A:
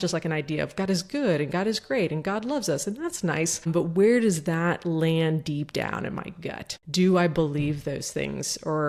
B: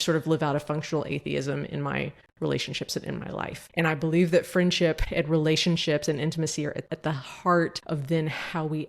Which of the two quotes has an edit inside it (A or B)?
B